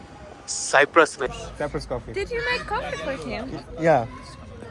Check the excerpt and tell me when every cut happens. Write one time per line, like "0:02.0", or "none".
0:01.4

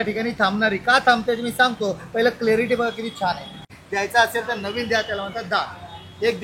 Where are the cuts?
0:03.8

